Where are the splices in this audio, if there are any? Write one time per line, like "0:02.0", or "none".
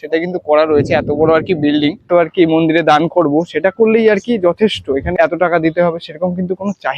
0:02.1
0:05.1